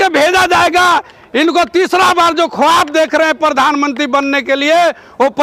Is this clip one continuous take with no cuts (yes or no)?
yes